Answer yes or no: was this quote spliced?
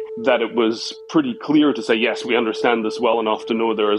no